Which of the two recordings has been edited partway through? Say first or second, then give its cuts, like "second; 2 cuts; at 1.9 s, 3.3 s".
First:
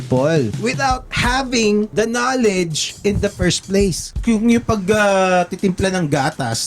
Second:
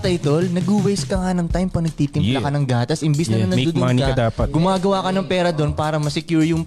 first; 4 cuts; at 0.8 s, 1.9 s, 2.9 s, 4.2 s